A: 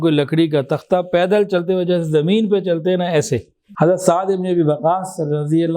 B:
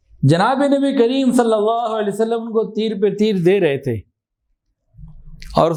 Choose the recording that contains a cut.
A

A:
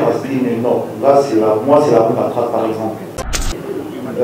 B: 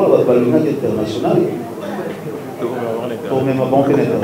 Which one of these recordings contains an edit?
A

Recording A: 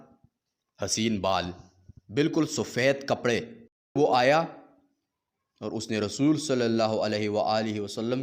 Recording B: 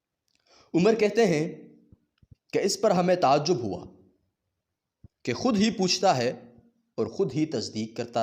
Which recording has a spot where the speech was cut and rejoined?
A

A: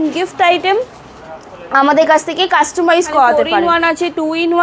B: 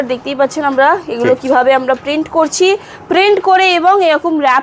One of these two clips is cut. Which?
A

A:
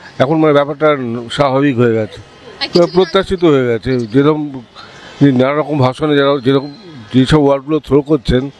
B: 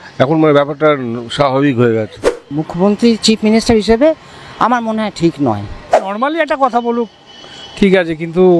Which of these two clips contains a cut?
B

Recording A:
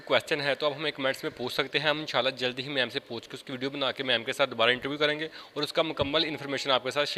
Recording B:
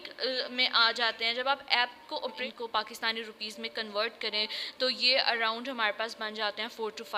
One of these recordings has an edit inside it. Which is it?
B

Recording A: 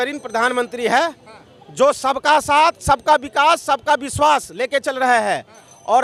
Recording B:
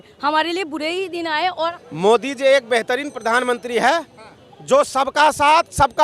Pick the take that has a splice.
B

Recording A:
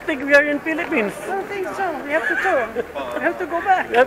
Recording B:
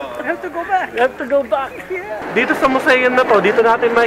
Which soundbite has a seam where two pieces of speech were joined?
B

